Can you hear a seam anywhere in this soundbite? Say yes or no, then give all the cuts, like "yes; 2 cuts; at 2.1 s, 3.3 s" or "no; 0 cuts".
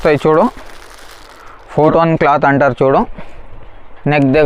yes; 1 cut; at 1.8 s